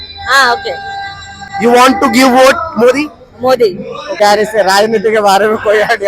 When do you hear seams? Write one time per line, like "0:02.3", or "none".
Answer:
0:04.2